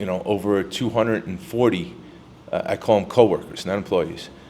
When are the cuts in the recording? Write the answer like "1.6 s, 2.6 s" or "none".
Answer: none